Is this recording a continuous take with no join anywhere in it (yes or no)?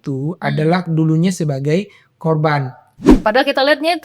no